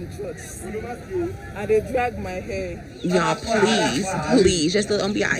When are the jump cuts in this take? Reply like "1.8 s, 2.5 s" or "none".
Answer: 2.9 s